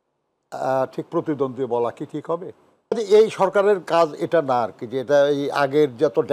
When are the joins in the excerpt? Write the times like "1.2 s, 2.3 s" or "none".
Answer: 2.9 s